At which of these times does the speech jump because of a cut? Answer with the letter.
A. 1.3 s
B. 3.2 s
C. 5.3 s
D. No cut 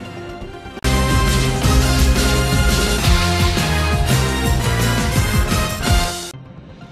D